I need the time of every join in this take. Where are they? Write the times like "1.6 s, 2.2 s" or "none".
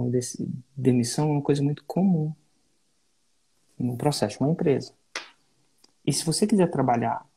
none